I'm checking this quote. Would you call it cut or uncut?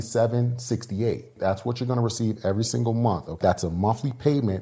cut